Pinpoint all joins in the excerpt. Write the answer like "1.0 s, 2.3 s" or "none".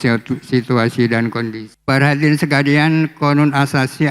1.7 s